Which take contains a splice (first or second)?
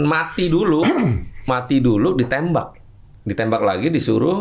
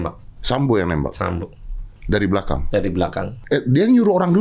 second